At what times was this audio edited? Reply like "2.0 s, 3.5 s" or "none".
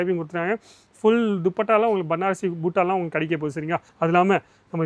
3.9 s